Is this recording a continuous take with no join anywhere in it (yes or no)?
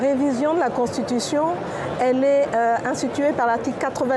yes